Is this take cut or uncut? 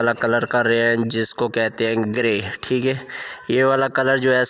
uncut